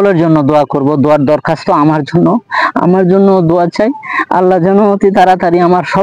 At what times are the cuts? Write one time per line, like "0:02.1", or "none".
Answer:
none